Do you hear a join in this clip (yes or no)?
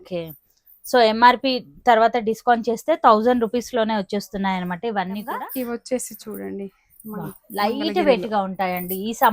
yes